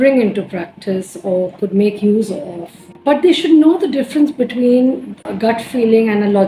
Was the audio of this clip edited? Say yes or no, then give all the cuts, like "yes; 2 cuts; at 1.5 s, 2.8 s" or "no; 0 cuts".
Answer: no; 0 cuts